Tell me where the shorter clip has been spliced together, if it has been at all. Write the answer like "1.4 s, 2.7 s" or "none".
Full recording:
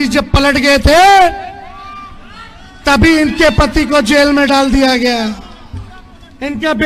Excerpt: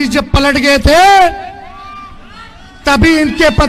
none